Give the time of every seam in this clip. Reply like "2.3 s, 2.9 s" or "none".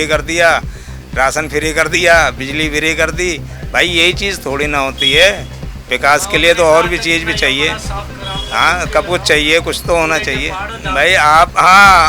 none